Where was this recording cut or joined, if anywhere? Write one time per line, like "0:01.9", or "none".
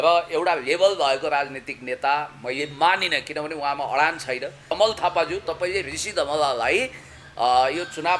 0:04.8